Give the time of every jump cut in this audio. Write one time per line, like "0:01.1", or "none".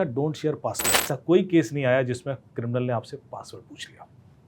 0:01.0

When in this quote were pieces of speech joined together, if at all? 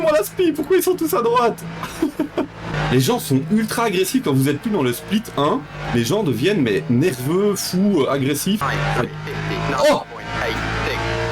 0:02.7
0:08.6

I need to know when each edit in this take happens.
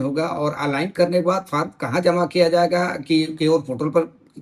none

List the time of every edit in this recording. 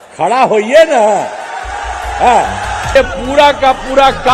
0:02.9

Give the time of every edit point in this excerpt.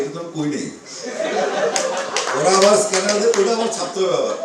none

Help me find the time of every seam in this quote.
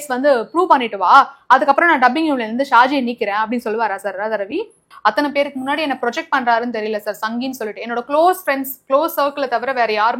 0:04.9

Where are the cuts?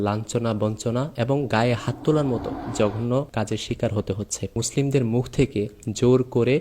0:02.6
0:03.3
0:04.6

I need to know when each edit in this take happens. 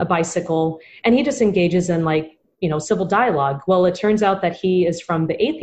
none

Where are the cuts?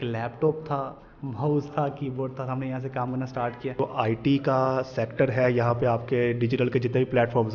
0:03.8

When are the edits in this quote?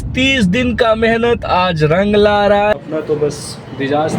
0:02.7

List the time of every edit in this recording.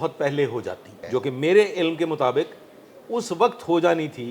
0:00.9

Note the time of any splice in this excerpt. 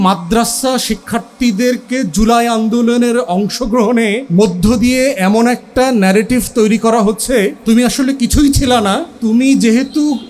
0:04.2
0:07.6
0:09.1

